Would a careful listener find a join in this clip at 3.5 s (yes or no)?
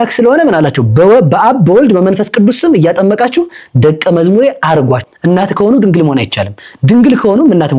no